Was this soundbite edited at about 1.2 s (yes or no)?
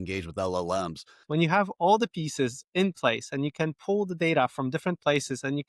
yes